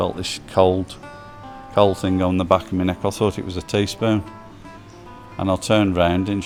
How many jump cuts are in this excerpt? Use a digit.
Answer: 0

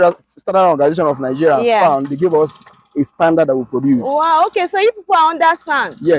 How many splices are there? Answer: 0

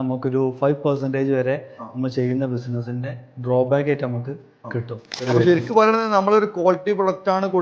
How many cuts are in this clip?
1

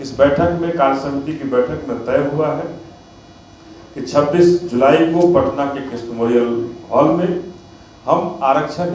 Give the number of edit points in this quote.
0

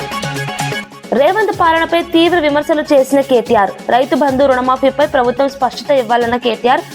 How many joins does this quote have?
1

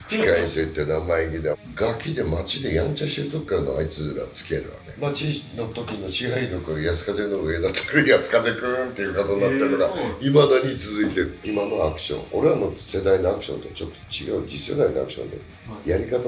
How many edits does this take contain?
3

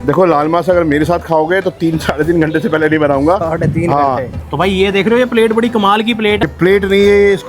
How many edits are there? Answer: 2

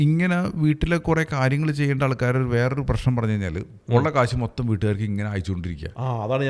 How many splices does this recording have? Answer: 1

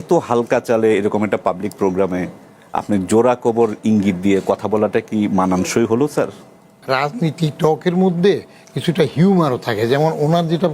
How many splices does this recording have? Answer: 1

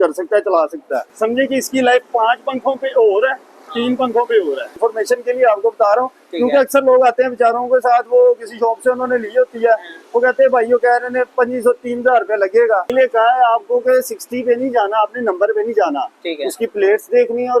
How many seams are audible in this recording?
3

